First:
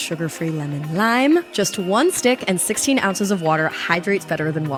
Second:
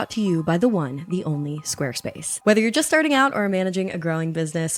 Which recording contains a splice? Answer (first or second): second